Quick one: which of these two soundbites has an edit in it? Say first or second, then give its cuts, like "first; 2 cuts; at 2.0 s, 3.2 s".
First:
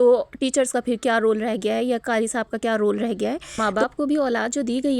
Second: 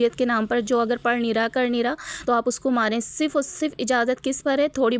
first; 1 cut; at 3.5 s